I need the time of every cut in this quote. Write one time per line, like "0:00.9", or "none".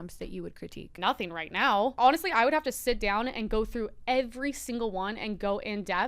0:01.0
0:01.9